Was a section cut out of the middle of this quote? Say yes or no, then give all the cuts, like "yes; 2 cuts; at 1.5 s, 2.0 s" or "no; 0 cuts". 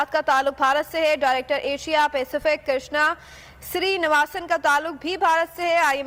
no; 0 cuts